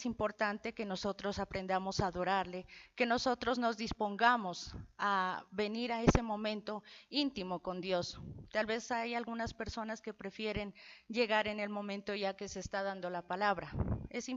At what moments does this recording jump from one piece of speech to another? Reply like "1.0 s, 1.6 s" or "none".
5.5 s